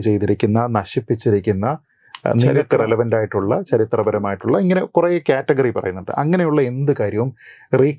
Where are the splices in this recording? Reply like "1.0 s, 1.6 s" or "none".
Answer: none